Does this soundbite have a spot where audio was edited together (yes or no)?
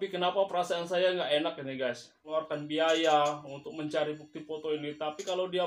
yes